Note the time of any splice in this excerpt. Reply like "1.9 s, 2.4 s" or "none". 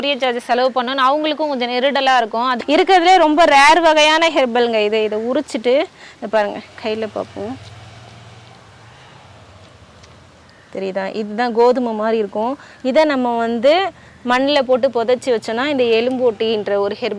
2.5 s